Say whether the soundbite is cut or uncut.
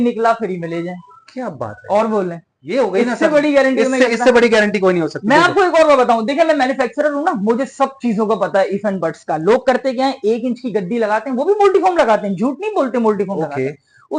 uncut